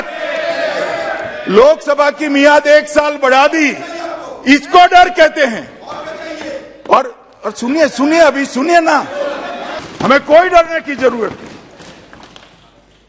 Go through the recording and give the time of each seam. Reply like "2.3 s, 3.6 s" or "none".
9.7 s